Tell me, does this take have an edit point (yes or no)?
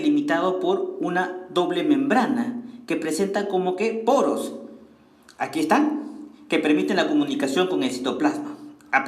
no